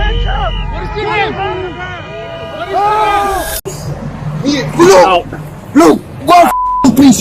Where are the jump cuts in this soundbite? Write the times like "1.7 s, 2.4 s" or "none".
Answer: 3.6 s